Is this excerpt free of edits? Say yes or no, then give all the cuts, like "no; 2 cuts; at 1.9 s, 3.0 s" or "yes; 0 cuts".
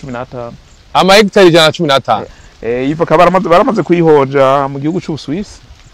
no; 1 cut; at 2.4 s